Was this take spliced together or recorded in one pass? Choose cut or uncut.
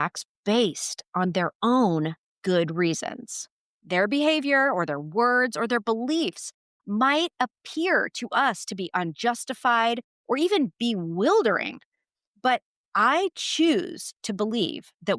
cut